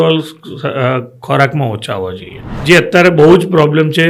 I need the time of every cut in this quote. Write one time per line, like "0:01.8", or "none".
0:02.5